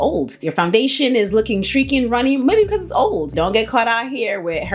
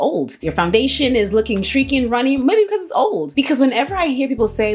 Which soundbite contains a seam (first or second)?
first